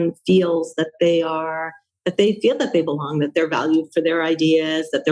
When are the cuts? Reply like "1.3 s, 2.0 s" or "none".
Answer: none